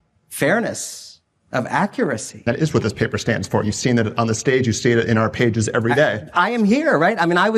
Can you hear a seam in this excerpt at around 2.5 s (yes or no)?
yes